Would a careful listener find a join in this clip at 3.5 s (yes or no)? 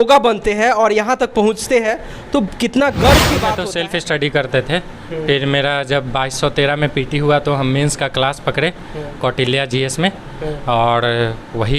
yes